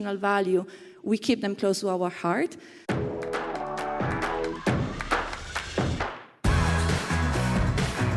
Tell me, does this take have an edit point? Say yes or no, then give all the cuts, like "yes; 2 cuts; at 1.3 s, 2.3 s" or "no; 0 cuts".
yes; 1 cut; at 2.7 s